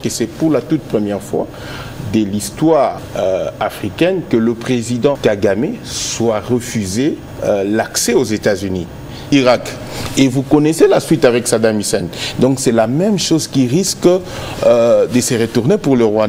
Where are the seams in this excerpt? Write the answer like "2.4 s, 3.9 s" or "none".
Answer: 3.0 s, 5.2 s, 7.3 s, 9.3 s